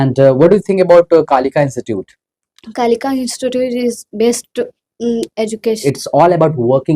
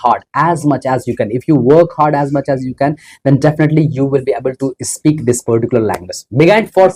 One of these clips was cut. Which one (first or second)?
first